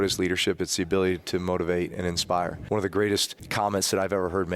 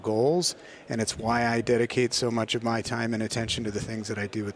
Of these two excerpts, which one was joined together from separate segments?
first; 2 cuts; at 2.6 s, 3.4 s

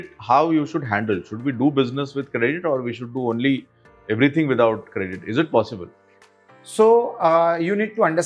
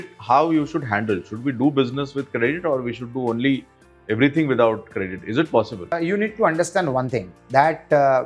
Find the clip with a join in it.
second; 1 cut; at 6.0 s

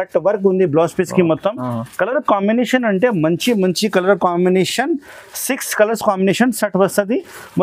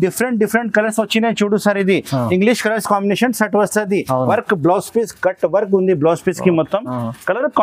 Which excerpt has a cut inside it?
second; 1 cut; at 4.3 s

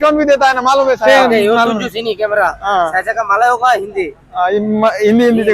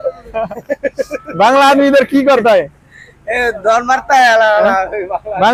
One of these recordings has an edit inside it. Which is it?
first; 1 cut; at 1.1 s

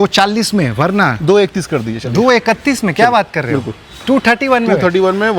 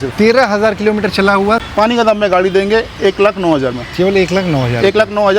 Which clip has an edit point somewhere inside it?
second; 1 cut; at 1.6 s

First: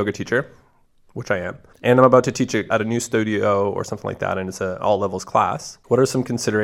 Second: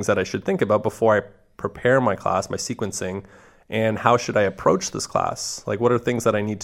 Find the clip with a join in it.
first; 3 cuts; at 1.7 s, 2.7 s, 5.7 s

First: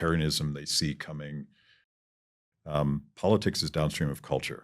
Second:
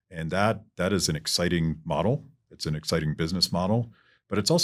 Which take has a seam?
first; 1 cut; at 2.1 s

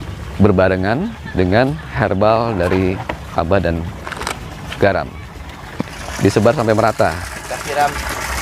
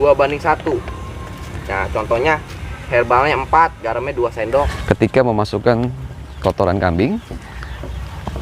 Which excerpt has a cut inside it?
second; 1 cut; at 4.7 s

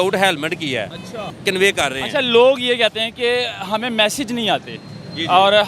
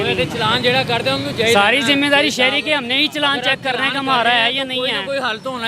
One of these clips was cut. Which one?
first; 1 cut; at 1.3 s

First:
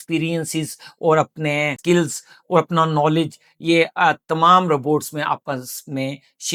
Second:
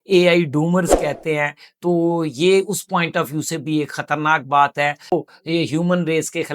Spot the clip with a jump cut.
second; 1 cut; at 5.1 s

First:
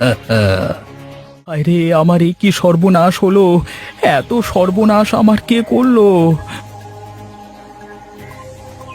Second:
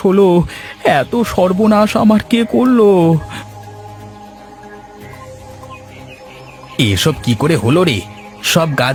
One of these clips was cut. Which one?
first; 1 cut; at 1.6 s

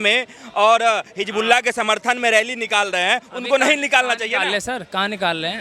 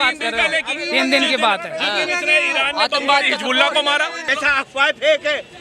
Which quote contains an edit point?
second; 1 cut; at 4.3 s

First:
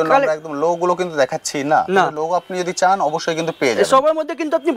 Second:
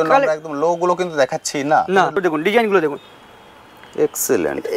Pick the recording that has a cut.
second; 1 cut; at 2.2 s

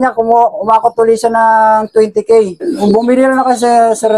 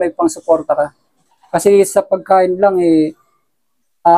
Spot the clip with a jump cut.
first; 1 cut; at 2.8 s

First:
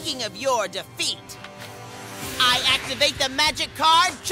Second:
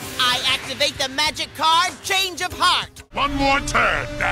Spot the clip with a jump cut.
second; 1 cut; at 3.1 s

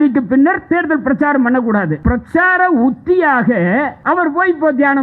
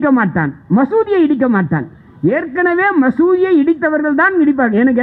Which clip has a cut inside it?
first; 2 cuts; at 2.0 s, 3.9 s

